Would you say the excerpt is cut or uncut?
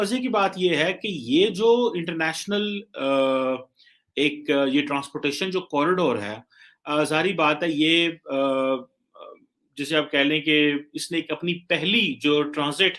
uncut